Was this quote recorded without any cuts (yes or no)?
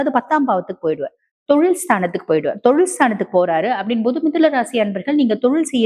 yes